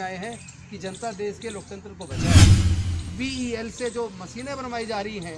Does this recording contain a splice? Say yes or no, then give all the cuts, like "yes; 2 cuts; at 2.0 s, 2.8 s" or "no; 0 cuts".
yes; 2 cuts; at 2.1 s, 3.0 s